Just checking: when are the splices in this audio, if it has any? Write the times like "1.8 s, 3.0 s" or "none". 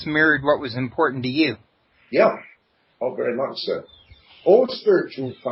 none